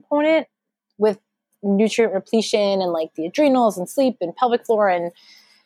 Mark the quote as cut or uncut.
uncut